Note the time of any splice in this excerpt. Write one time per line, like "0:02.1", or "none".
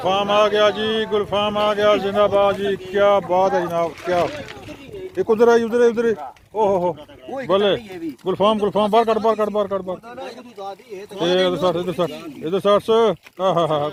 none